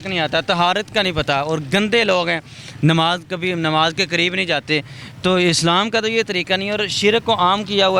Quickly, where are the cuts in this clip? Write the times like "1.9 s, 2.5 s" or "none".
none